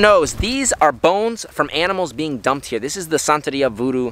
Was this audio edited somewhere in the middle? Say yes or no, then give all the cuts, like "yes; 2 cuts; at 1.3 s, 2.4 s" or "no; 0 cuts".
no; 0 cuts